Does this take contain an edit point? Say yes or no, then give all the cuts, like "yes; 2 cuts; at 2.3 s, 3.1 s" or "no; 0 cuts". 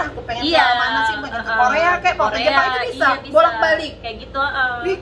no; 0 cuts